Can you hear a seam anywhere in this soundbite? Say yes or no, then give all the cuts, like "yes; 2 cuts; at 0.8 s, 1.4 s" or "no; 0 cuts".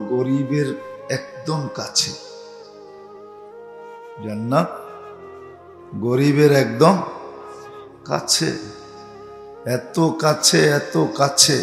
no; 0 cuts